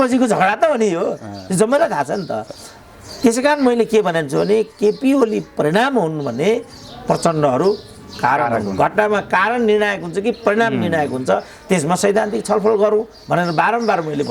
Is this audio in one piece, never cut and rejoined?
yes; 0 cuts

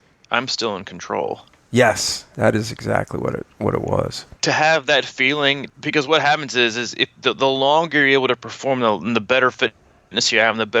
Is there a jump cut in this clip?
yes; 2 cuts; at 4.4 s, 5.7 s

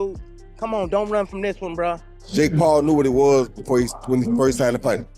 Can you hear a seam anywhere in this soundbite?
yes; 1 cut; at 2.1 s

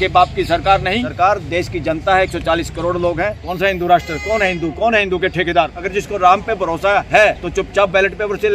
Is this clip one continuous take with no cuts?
no; 4 cuts; at 1.1 s, 3.4 s, 5.8 s, 7.4 s

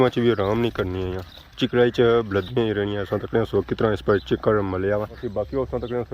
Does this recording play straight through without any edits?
no; 1 cut; at 5.2 s

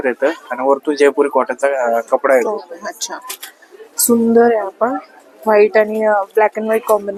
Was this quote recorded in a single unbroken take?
yes; 0 cuts

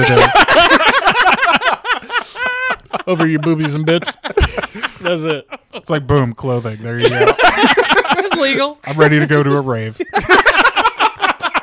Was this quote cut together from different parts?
no; 0 cuts

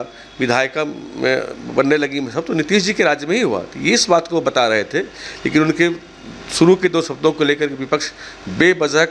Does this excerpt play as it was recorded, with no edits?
yes; 0 cuts

